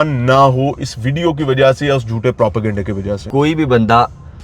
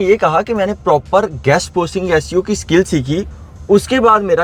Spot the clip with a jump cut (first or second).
first